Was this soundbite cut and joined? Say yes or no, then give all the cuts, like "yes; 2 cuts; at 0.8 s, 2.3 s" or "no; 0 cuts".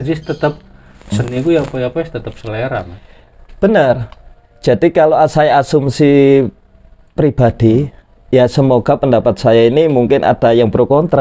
no; 0 cuts